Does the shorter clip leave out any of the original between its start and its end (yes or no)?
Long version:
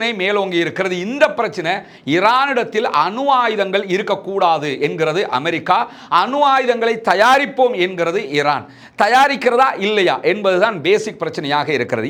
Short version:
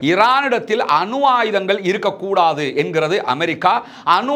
no